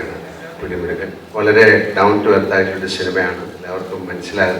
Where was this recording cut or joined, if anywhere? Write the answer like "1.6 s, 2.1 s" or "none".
1.2 s, 3.5 s